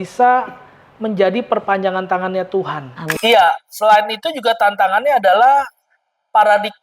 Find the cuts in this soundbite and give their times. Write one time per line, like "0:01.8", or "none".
0:03.2